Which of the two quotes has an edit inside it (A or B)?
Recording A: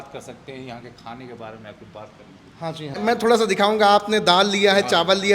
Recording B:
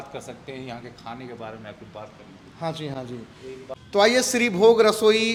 A